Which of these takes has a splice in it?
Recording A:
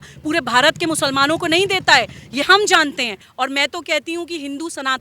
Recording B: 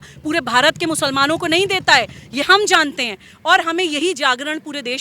A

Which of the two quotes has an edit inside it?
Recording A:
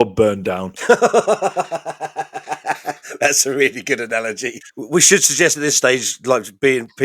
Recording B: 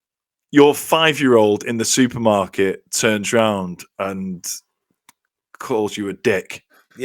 A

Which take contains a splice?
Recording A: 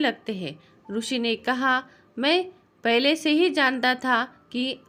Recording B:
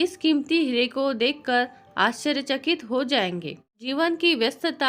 B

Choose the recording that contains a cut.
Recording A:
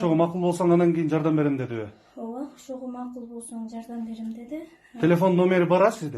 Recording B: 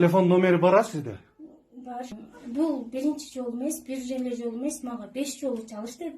B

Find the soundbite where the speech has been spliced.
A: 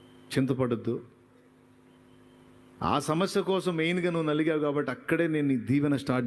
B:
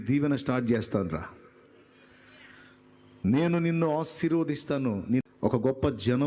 B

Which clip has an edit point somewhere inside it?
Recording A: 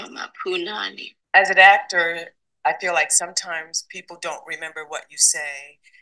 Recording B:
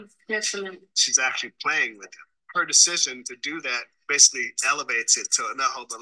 A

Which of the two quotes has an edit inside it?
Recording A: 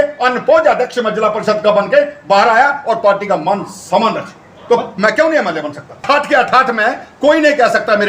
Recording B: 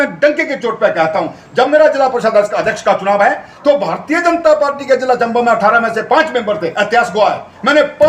A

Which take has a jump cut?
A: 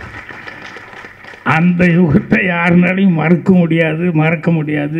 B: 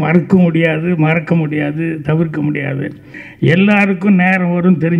B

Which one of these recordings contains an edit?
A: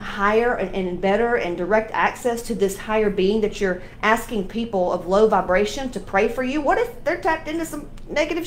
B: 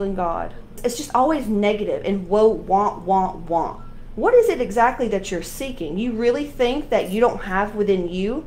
B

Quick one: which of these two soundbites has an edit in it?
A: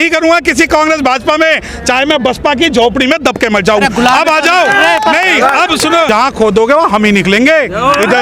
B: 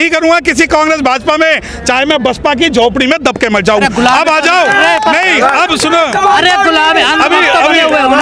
A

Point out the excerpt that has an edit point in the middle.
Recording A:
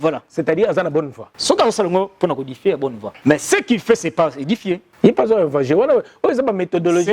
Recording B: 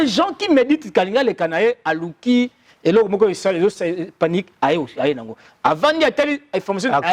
A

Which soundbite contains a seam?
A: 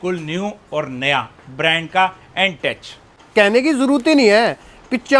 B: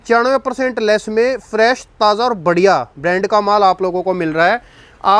A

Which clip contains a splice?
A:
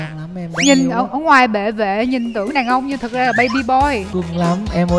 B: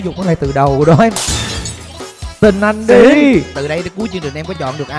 A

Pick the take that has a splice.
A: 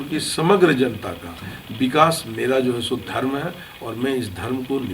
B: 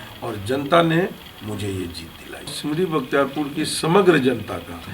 B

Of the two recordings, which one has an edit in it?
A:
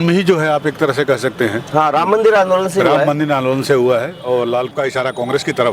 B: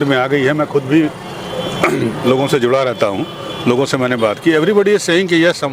A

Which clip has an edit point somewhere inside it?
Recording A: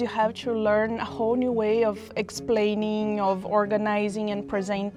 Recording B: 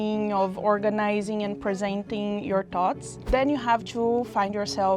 B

